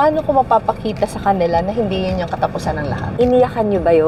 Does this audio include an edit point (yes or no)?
yes